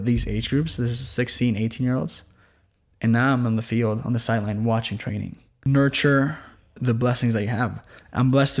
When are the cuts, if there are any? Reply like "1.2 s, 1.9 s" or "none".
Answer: 5.5 s